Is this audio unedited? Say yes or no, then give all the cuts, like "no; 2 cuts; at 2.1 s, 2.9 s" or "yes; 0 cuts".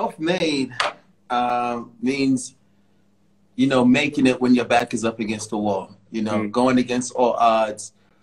yes; 0 cuts